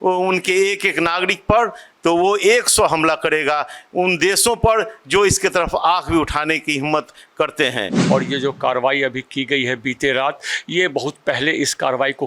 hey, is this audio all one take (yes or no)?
no